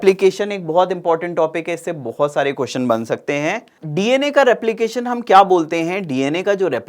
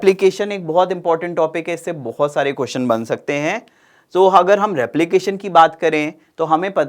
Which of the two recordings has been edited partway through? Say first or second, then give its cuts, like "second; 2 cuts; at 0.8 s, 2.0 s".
first; 1 cut; at 3.8 s